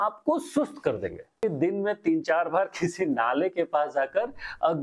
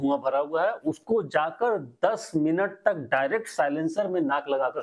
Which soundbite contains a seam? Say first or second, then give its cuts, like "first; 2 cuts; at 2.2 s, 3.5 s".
first; 1 cut; at 1.4 s